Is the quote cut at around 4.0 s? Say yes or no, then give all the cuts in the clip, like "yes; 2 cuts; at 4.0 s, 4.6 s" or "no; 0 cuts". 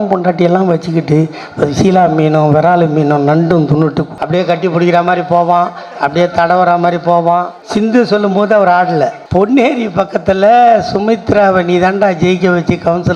yes; 3 cuts; at 4.0 s, 7.6 s, 9.2 s